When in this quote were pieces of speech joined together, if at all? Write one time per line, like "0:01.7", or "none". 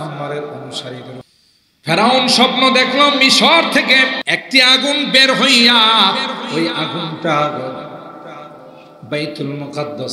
0:01.2
0:04.2